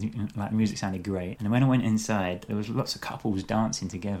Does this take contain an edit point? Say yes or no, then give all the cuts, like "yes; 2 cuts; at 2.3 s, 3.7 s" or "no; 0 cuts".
yes; 2 cuts; at 1.3 s, 2.5 s